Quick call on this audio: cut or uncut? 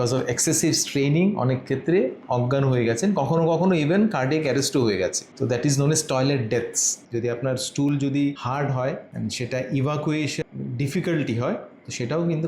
cut